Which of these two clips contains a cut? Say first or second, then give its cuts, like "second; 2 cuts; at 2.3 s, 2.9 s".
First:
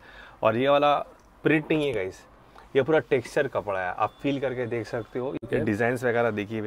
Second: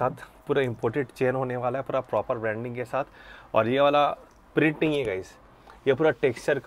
first; 1 cut; at 5.3 s